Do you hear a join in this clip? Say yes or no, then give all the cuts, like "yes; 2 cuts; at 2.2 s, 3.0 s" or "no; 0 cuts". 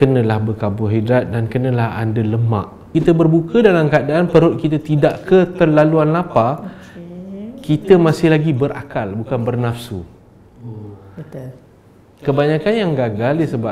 yes; 1 cut; at 2.9 s